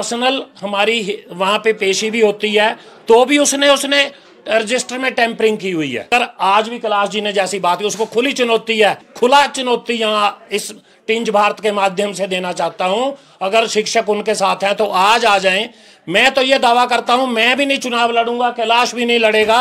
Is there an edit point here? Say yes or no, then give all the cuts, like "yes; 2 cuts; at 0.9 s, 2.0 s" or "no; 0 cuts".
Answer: yes; 2 cuts; at 6.1 s, 9.0 s